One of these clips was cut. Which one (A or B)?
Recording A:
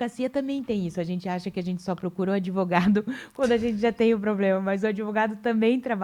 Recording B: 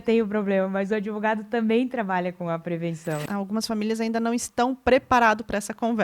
B